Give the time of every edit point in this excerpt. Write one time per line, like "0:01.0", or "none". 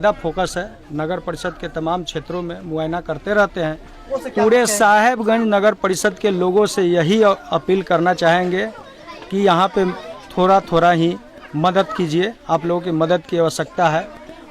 0:04.1